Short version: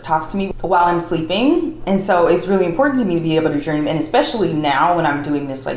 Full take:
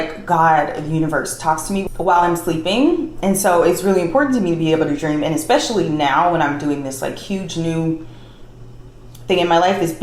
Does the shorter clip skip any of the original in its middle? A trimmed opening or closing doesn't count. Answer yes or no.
no